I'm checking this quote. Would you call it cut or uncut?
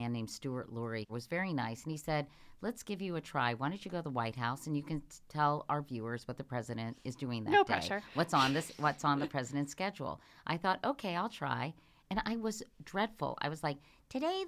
cut